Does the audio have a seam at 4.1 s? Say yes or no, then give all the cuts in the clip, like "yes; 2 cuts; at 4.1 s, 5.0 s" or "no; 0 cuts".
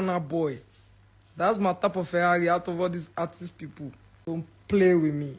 yes; 1 cut; at 4.1 s